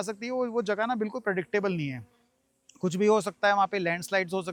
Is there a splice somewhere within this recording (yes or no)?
no